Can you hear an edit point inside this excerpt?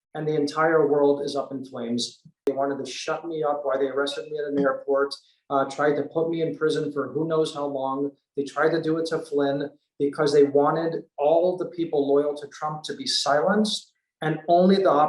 yes; 1 cut; at 2.5 s

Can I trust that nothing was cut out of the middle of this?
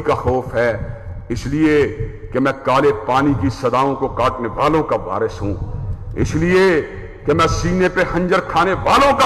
yes; 0 cuts

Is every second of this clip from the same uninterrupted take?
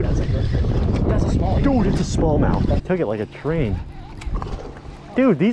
no; 1 cut; at 2.8 s

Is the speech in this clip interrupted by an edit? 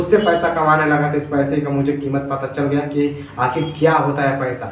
no; 0 cuts

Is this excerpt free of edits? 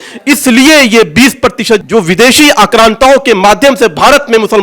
no; 1 cut; at 1.8 s

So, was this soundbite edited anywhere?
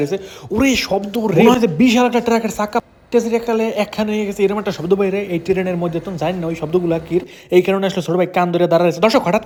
no; 0 cuts

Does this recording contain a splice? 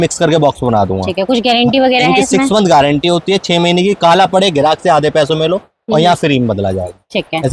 no; 0 cuts

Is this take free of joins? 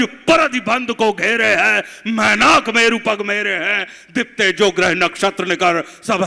yes; 0 cuts

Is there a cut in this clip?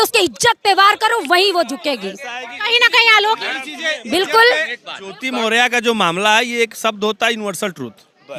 no; 0 cuts

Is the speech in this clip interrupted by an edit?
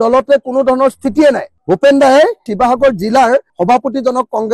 yes; 1 cut; at 2.4 s

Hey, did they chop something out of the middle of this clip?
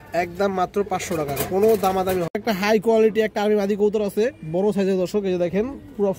yes; 1 cut; at 2.3 s

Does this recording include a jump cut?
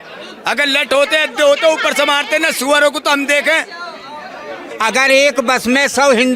yes; 1 cut; at 4.7 s

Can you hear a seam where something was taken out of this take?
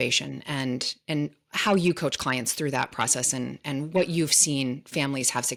no; 0 cuts

